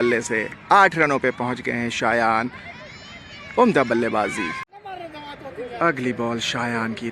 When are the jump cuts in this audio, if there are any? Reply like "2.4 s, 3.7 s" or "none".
4.7 s